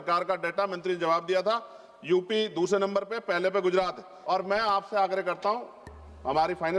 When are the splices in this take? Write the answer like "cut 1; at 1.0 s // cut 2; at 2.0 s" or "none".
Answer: cut 1; at 4.1 s